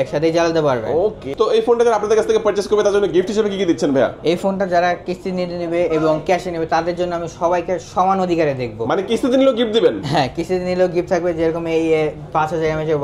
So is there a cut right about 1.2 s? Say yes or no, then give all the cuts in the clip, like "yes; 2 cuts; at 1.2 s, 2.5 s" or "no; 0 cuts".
yes; 1 cut; at 1.2 s